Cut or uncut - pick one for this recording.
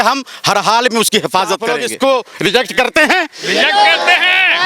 cut